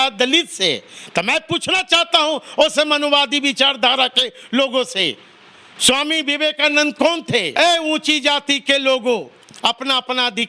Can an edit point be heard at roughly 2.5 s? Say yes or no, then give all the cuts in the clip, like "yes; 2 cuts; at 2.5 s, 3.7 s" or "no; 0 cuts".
no; 1 cut; at 7.5 s